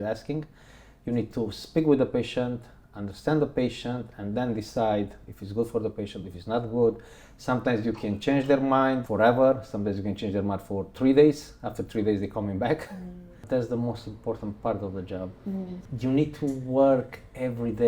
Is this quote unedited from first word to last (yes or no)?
no